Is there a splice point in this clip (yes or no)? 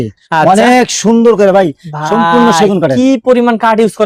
no